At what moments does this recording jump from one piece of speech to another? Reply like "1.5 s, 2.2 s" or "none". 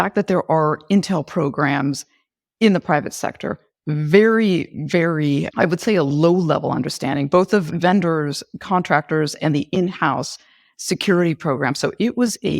7.7 s